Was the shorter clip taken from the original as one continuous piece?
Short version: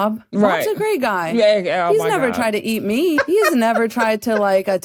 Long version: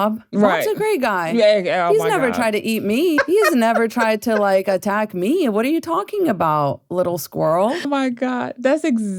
yes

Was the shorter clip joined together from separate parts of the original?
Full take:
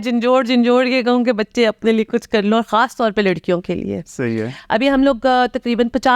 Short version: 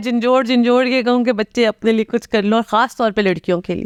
no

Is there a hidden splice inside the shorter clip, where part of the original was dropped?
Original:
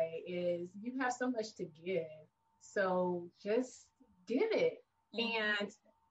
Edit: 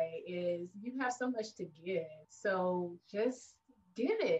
yes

